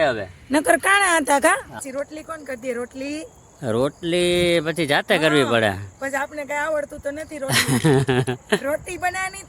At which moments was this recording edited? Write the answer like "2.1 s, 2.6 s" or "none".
1.7 s